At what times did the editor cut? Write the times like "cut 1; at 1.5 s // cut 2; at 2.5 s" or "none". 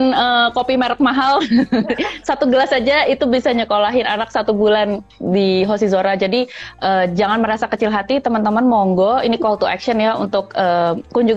none